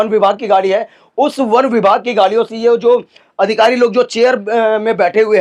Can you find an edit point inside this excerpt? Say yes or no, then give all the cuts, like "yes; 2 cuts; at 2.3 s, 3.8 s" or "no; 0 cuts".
no; 0 cuts